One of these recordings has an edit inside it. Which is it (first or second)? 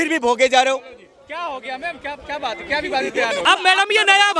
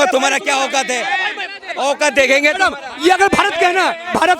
first